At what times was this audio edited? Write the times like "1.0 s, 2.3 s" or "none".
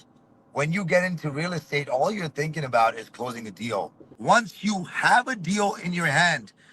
4.1 s